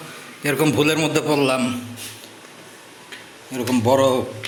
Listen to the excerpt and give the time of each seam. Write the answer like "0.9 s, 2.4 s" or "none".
none